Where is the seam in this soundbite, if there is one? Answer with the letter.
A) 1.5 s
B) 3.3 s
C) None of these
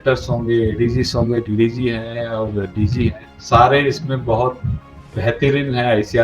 B